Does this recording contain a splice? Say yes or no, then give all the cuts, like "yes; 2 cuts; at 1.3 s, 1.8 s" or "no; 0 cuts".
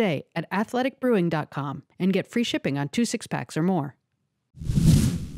yes; 1 cut; at 4.5 s